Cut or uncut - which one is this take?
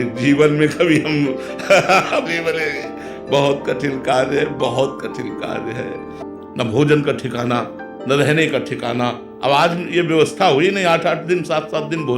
cut